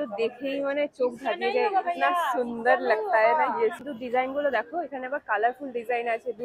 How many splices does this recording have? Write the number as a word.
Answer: one